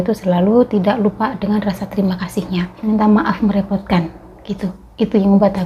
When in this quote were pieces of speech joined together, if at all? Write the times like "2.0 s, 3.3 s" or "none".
2.8 s